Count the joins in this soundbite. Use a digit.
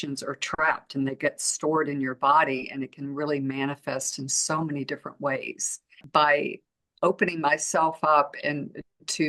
1